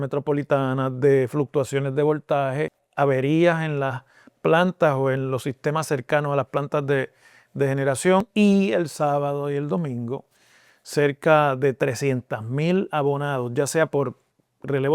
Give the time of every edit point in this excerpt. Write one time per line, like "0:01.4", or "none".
0:02.8
0:08.3